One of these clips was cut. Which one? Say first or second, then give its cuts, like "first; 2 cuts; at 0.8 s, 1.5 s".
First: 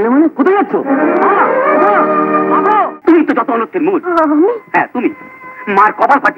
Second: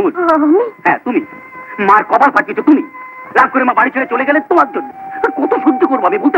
first; 1 cut; at 2.9 s